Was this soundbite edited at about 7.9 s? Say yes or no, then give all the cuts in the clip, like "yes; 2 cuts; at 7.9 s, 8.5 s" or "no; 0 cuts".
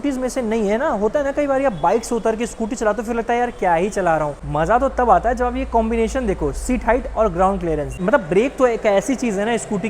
yes; 2 cuts; at 4.4 s, 7.9 s